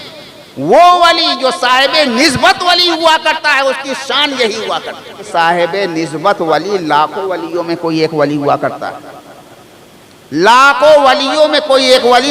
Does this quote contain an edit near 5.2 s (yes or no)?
yes